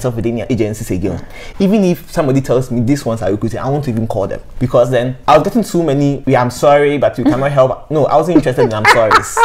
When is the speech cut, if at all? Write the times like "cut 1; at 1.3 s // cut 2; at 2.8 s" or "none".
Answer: none